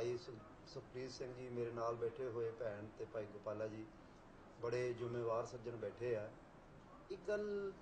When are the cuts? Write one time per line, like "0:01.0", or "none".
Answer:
0:02.6

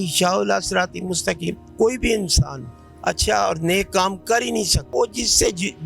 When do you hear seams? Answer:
0:01.6
0:04.8

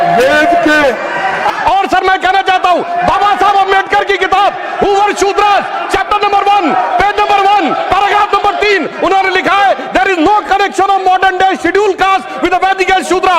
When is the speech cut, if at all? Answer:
0:01.5

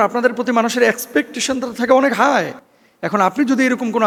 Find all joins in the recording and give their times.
none

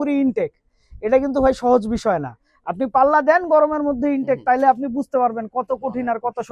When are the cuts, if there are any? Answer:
none

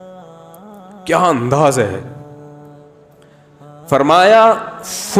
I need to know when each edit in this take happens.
0:01.1
0:02.1
0:03.9

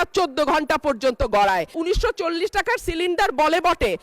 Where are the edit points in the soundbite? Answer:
0:01.8

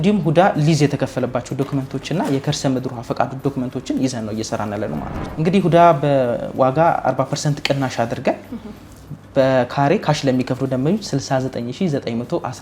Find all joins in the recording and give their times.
0:05.2

